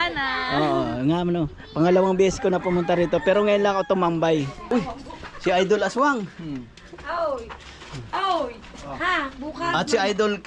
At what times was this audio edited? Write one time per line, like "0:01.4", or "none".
0:04.6